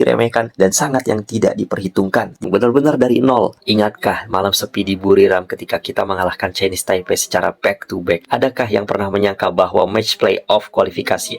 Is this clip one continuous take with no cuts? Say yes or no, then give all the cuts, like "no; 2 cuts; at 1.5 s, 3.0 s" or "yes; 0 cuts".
no; 1 cut; at 2.4 s